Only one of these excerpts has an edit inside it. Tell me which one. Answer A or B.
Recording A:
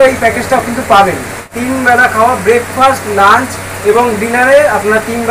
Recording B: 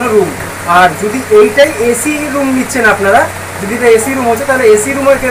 A